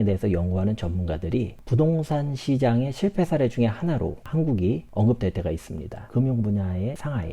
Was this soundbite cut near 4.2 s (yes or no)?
no